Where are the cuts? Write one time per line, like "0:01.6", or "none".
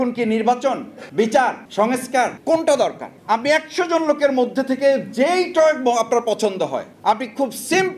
0:00.9
0:02.0
0:03.1
0:06.9